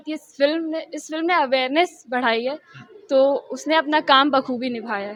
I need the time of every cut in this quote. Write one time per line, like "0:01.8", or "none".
none